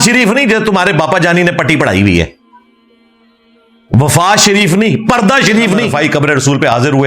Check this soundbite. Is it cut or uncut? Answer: cut